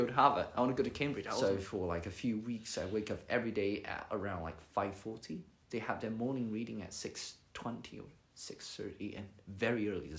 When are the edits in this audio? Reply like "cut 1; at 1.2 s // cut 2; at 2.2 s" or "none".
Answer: cut 1; at 1.3 s